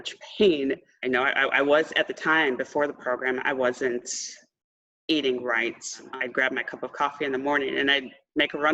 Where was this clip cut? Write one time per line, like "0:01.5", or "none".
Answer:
0:00.9
0:06.0